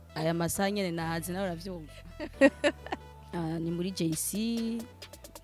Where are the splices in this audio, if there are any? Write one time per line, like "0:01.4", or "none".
0:03.2

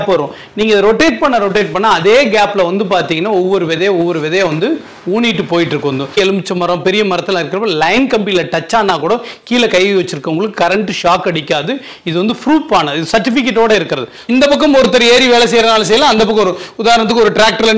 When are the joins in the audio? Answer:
0:06.1
0:14.3

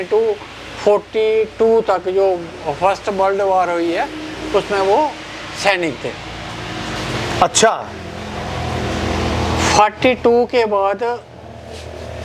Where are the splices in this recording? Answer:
none

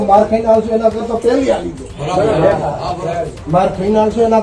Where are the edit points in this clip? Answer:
none

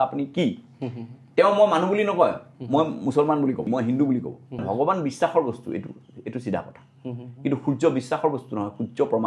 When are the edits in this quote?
0:03.7
0:04.6

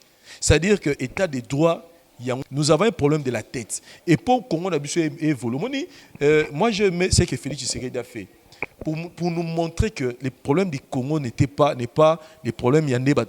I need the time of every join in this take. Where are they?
0:02.4

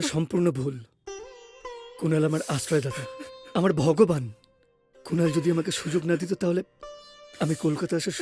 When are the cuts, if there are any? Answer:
none

